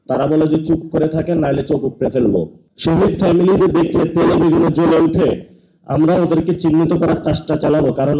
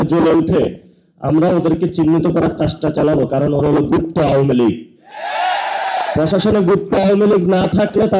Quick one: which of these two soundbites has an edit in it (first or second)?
first